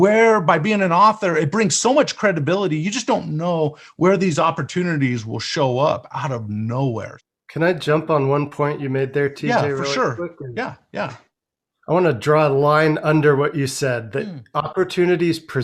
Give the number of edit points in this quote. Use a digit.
1